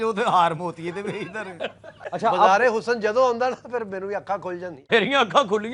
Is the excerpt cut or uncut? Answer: uncut